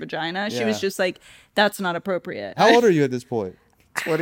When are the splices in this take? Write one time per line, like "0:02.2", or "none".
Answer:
0:02.5